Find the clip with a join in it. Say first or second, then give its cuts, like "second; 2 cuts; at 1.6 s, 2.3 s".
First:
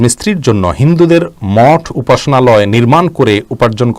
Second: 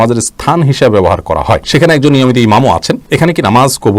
second; 2 cuts; at 1.6 s, 3.0 s